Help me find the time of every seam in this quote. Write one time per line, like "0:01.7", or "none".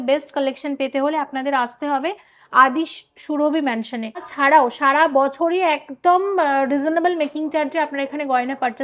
0:04.3

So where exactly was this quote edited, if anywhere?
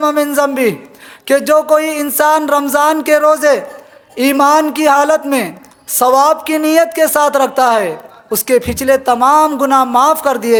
none

